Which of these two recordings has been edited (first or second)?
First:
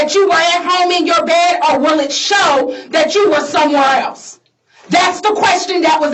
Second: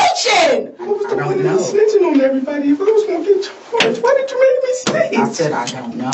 second